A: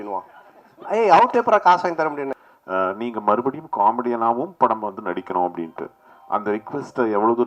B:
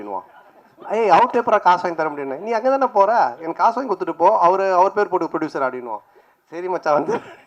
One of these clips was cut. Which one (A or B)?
A